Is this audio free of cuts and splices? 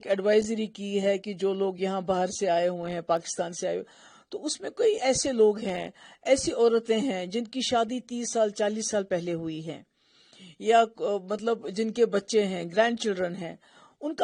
yes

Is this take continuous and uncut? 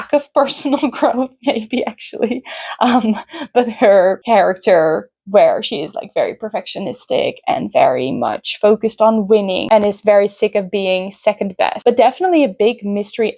yes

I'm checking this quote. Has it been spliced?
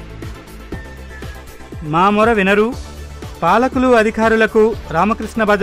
yes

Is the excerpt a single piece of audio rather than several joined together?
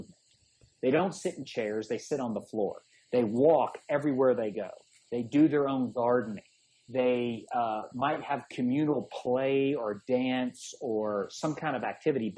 yes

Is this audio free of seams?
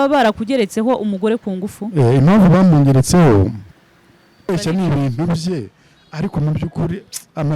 no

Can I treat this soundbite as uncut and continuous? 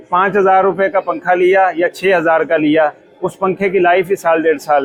yes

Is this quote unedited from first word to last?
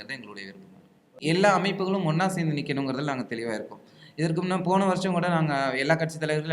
no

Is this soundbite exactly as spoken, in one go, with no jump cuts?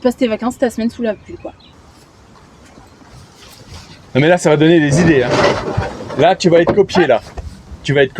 no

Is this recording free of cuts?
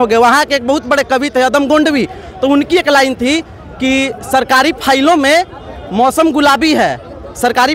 yes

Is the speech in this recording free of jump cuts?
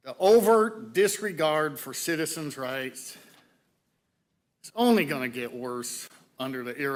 yes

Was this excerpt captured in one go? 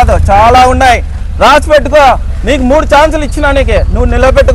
yes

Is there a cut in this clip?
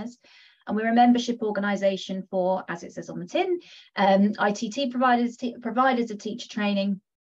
no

